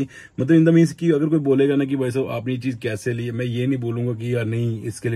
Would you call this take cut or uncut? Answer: uncut